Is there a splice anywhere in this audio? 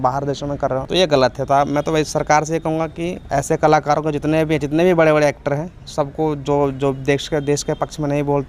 no; 0 cuts

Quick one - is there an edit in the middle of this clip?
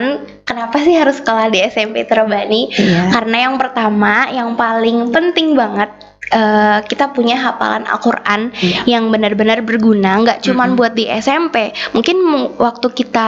no; 0 cuts

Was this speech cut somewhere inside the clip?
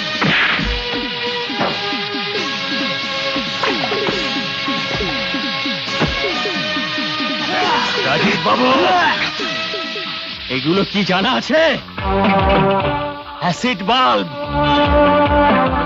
no; 0 cuts

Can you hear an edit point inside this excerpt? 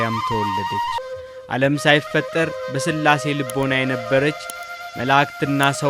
yes; 1 cut; at 1.0 s

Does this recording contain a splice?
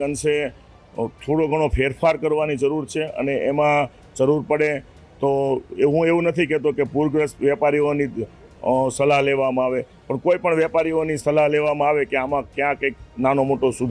no; 0 cuts

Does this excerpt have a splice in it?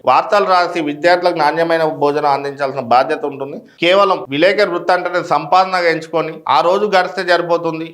yes; 1 cut; at 3.8 s

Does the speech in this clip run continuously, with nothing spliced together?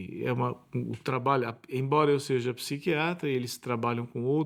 yes; 0 cuts

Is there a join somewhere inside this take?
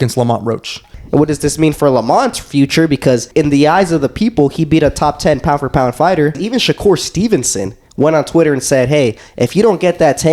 yes; 3 cuts; at 0.9 s, 3.3 s, 6.4 s

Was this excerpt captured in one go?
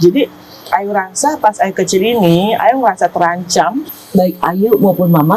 no; 1 cut; at 3.9 s

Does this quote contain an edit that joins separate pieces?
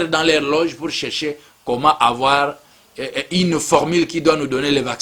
no; 0 cuts

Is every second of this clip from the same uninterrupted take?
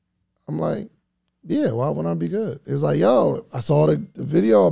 yes; 0 cuts

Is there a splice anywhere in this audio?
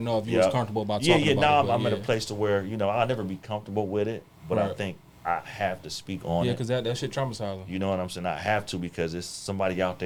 no; 0 cuts

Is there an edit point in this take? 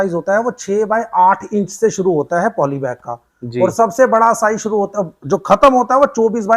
no; 0 cuts

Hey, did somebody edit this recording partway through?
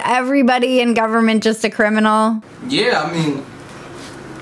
no; 0 cuts

